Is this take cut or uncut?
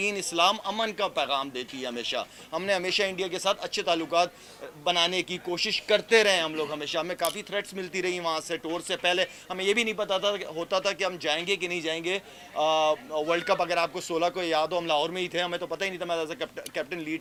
uncut